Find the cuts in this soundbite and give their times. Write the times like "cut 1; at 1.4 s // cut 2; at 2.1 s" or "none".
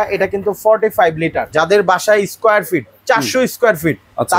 cut 1; at 1.5 s